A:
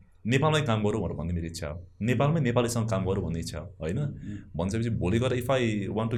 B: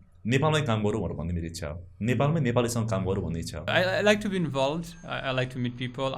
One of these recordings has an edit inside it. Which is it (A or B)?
B